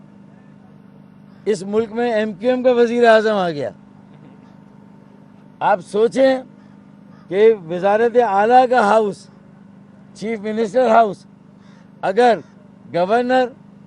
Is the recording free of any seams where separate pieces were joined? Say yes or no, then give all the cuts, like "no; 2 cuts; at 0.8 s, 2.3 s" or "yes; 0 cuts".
yes; 0 cuts